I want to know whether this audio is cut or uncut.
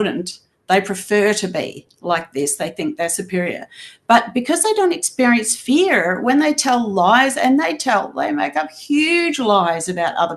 uncut